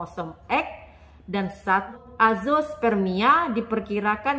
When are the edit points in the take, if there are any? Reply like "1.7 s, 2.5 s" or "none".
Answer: 2.0 s